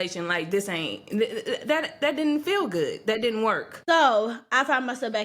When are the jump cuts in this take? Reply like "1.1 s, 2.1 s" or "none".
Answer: 3.7 s